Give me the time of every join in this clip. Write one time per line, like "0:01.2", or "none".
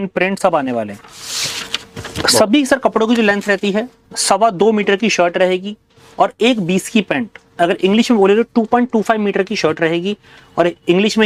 none